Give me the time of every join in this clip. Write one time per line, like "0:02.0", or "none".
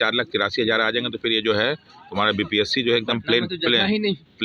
none